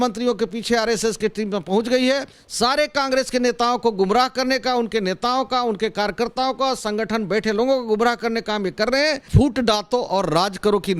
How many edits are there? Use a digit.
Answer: 2